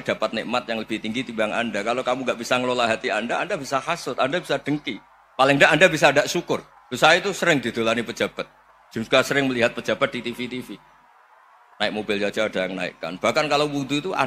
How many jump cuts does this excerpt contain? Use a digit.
1